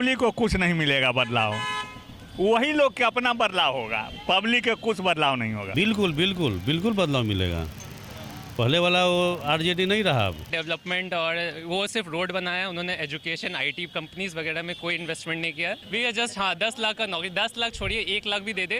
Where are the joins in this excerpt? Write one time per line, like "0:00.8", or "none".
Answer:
0:05.7
0:10.5
0:15.8